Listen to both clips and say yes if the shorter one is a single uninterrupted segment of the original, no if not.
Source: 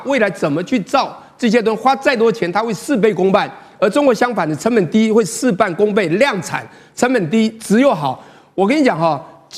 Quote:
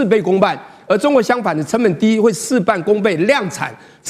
yes